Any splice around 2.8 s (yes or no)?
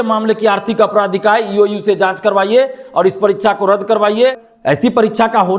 no